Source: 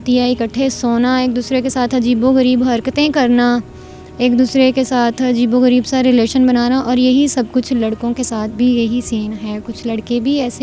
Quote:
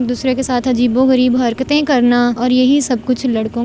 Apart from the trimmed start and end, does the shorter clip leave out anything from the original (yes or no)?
yes